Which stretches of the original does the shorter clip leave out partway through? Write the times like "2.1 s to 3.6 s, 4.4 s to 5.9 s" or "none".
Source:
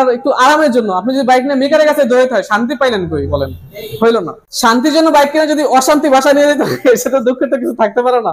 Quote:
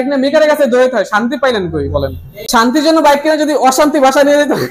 3.7 s to 4.4 s